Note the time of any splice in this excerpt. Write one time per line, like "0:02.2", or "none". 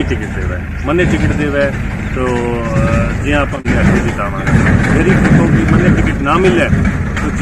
0:03.6